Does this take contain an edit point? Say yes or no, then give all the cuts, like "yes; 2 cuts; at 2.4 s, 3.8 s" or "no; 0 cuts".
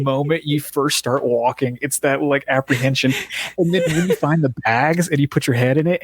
no; 0 cuts